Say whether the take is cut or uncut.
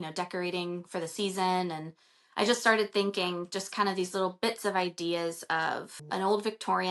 cut